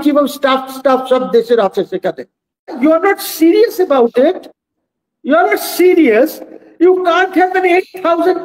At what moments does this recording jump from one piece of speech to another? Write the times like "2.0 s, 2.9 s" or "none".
2.7 s